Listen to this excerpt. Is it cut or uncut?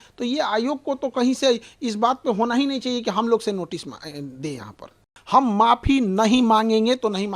cut